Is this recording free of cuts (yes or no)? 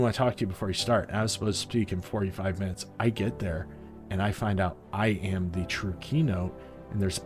yes